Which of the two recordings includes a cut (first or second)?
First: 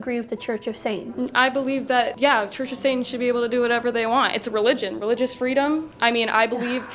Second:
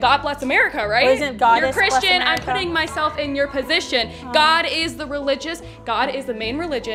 first